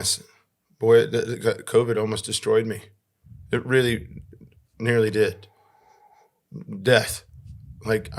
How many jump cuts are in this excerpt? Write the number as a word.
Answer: zero